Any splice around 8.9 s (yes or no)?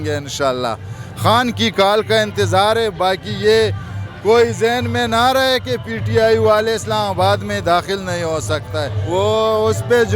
yes